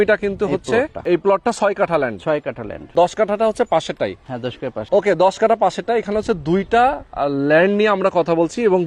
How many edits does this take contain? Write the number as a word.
three